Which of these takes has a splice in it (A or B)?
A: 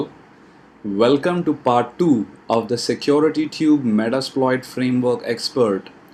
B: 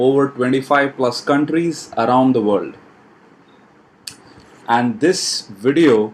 B